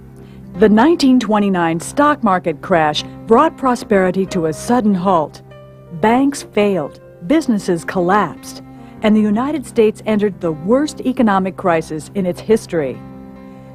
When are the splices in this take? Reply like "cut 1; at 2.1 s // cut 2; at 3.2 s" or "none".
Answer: none